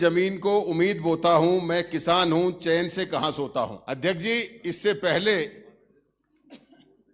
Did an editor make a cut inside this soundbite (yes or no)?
yes